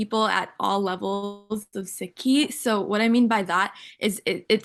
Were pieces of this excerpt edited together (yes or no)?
no